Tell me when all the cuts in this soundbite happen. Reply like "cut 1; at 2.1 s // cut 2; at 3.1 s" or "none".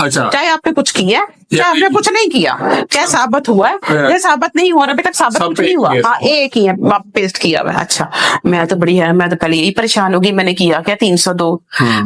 none